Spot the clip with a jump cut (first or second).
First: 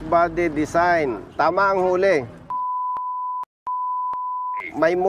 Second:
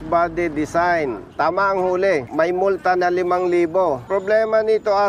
second